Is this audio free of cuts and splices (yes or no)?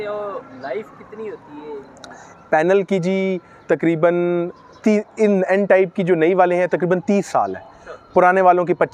yes